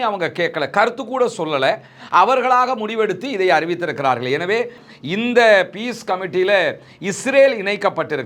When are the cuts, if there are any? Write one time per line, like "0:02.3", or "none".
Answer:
0:04.8